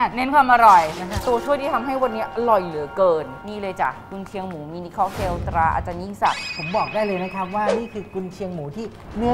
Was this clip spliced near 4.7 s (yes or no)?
no